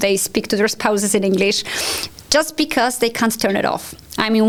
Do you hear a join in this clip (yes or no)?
no